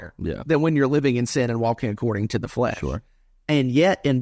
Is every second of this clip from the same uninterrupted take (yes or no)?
yes